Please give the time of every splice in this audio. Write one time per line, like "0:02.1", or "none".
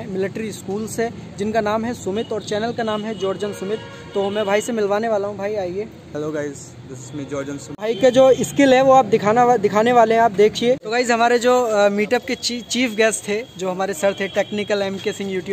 0:07.7
0:10.8

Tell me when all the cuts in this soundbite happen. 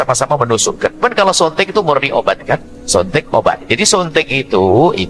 0:01.0
0:03.6

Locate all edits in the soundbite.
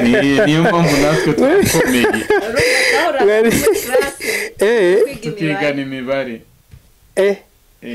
none

